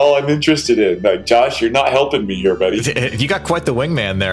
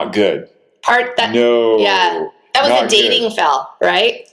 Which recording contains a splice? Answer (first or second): first